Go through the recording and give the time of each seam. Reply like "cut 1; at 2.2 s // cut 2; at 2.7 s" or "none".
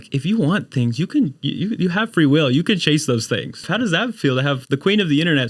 cut 1; at 3.6 s

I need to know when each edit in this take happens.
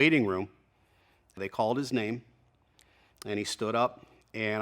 cut 1; at 1.4 s

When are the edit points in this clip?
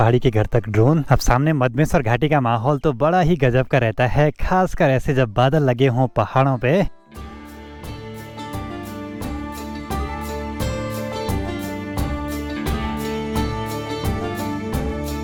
none

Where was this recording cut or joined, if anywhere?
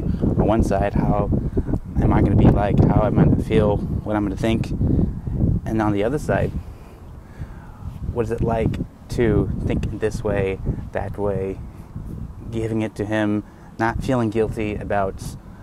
none

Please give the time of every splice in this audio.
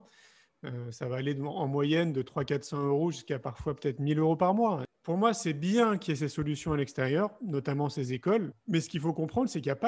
cut 1; at 4.9 s // cut 2; at 8.6 s

